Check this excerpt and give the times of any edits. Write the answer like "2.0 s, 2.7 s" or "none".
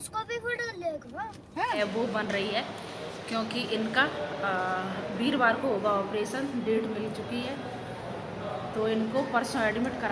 1.8 s